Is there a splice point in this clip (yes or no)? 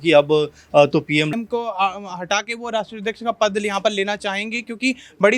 yes